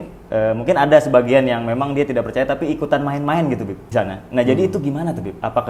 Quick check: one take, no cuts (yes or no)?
no